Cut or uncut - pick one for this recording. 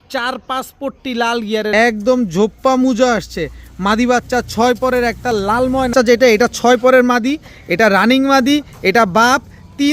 cut